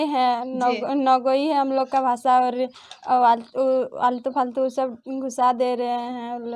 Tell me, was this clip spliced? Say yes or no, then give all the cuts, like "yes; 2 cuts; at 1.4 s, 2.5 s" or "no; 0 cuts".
no; 0 cuts